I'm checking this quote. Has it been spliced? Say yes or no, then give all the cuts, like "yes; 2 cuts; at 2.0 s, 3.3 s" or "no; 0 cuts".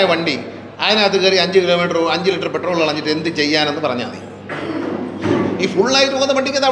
no; 0 cuts